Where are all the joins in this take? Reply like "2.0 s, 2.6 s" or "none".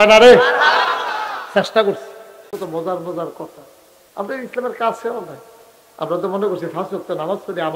2.6 s